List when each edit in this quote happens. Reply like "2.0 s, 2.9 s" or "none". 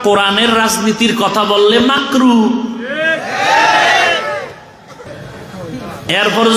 5.2 s